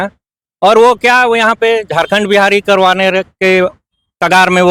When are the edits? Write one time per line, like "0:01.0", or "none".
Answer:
none